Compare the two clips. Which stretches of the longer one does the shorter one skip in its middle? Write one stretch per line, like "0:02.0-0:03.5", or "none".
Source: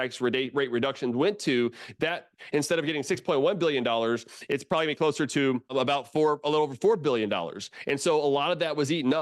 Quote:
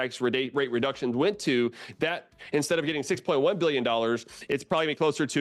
none